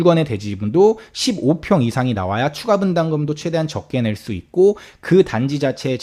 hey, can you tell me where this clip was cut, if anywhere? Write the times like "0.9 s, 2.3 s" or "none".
none